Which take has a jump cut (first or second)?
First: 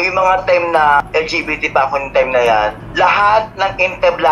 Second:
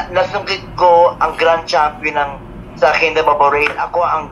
first